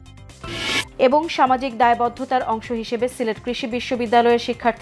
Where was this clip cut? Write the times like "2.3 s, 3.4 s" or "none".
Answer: none